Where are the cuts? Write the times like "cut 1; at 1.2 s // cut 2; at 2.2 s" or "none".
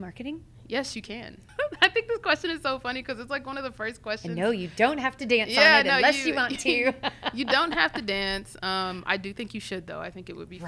cut 1; at 1.4 s